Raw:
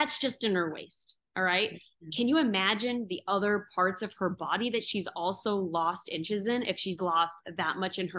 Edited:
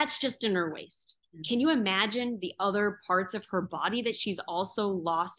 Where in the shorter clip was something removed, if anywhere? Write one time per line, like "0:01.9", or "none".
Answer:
0:01.2